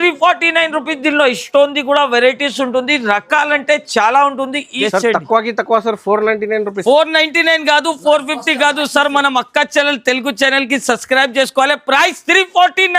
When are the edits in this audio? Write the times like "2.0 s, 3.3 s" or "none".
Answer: 4.8 s

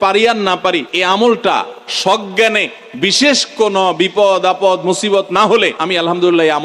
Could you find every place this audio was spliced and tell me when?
0.9 s, 5.8 s

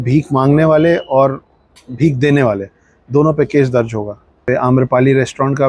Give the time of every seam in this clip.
4.4 s

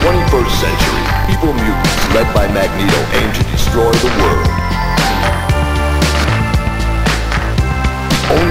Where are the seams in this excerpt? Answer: none

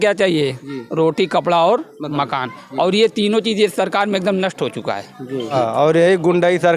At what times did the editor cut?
5.5 s

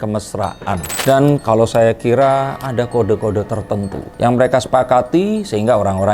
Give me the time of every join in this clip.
1.0 s

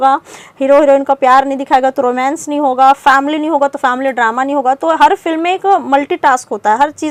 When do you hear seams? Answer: none

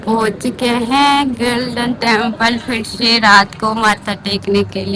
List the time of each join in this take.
none

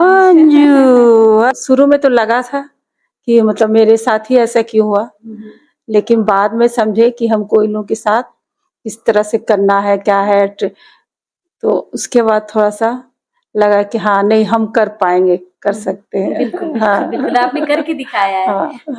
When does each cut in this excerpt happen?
1.5 s

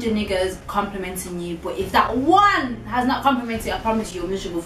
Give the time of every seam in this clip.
none

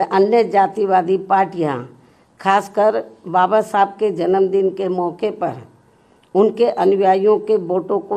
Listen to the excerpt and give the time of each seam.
none

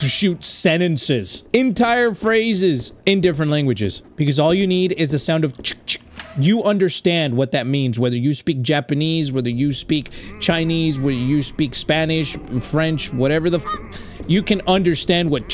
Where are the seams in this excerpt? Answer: 1.3 s, 2.9 s, 4.0 s

